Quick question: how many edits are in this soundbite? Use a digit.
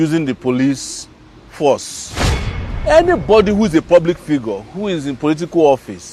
1